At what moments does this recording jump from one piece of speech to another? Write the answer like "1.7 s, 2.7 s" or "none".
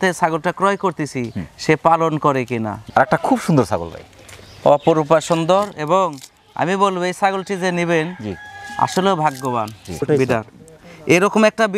2.8 s, 10.0 s